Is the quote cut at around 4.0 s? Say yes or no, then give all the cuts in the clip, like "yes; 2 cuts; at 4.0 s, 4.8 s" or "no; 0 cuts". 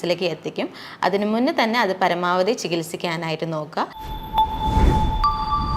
yes; 1 cut; at 4.0 s